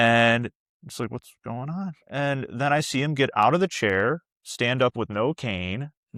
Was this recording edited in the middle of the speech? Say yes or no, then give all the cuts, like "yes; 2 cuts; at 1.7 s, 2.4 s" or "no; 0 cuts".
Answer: no; 0 cuts